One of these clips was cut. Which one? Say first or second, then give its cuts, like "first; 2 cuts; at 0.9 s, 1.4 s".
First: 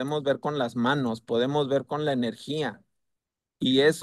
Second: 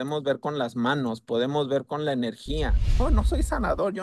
second; 1 cut; at 3.0 s